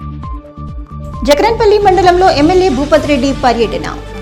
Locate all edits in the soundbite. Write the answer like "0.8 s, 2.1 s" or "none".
0.9 s